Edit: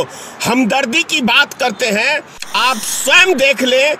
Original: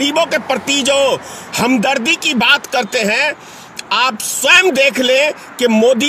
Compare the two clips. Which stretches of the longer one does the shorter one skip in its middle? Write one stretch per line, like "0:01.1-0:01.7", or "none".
0:03.5-0:03.7